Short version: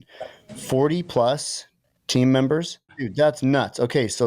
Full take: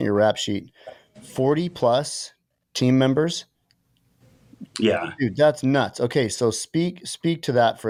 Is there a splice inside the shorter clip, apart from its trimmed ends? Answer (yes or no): yes